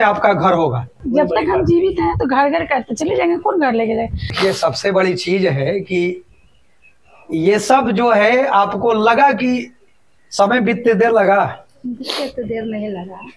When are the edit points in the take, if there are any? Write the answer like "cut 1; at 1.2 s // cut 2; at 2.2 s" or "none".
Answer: cut 1; at 1.0 s // cut 2; at 4.3 s